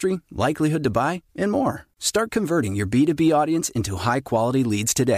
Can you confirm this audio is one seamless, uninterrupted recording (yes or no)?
yes